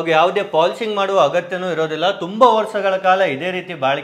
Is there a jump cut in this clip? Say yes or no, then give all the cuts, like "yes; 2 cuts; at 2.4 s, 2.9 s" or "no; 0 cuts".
no; 0 cuts